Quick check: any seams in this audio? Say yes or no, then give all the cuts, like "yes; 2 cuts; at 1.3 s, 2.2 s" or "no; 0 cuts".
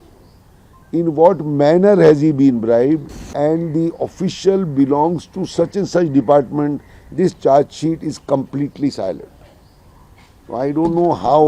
yes; 1 cut; at 3.2 s